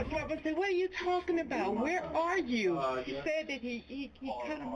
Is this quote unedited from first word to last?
no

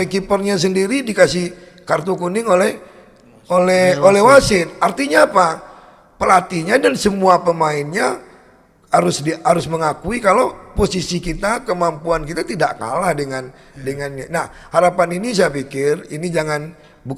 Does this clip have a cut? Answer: no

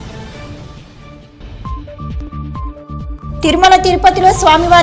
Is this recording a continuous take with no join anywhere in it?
no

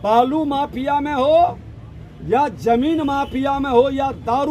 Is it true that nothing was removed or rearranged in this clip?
yes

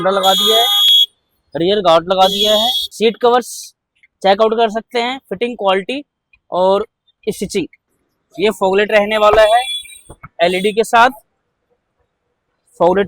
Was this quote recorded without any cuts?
no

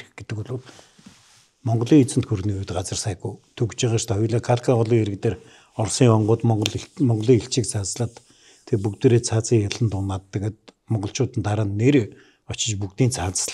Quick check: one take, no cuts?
yes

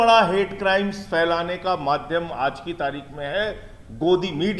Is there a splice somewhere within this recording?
no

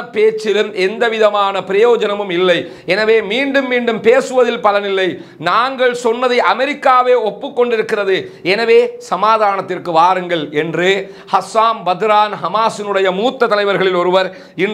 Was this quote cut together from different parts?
no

